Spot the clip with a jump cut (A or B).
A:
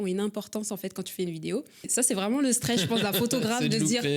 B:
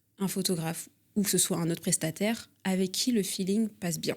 A